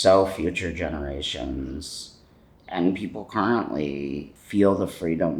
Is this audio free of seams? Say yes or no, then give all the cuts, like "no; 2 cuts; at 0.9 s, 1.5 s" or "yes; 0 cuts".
no; 1 cut; at 4.3 s